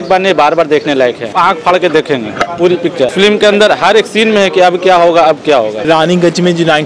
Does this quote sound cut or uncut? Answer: cut